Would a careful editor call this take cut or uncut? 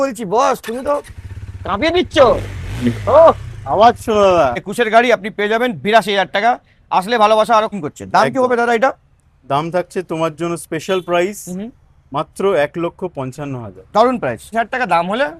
cut